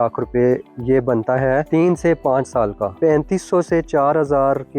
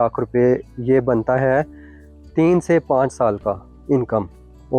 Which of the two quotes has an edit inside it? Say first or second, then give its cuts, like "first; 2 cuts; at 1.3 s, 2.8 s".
first; 2 cuts; at 1.7 s, 2.9 s